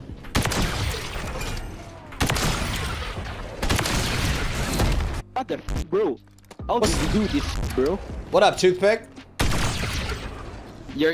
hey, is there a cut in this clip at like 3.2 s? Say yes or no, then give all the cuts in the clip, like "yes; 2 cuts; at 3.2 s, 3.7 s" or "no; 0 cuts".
yes; 2 cuts; at 3.2 s, 5.1 s